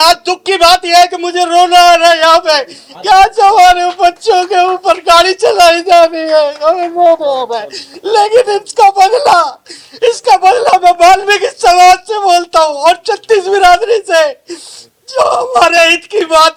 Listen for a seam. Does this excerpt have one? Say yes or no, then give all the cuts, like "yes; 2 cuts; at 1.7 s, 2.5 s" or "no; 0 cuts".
no; 0 cuts